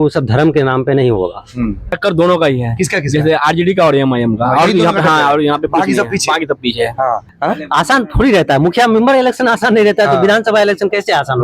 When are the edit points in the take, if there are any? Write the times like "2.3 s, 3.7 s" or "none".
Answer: 1.9 s, 7.3 s